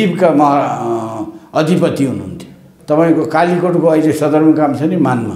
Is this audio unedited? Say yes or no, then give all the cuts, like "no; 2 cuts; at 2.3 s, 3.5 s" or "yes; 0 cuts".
no; 1 cut; at 2.7 s